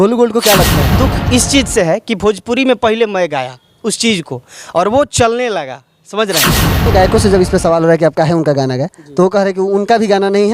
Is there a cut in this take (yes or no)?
yes